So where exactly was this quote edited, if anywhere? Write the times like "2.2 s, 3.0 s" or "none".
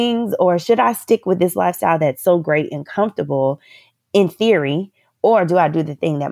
none